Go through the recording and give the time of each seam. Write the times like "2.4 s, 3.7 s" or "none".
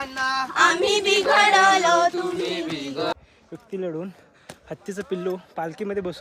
3.1 s